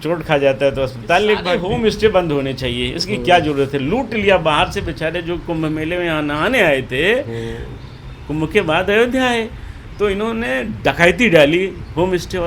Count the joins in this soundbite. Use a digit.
1